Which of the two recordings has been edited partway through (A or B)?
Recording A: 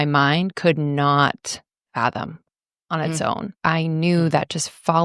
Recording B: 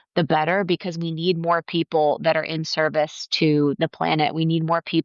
A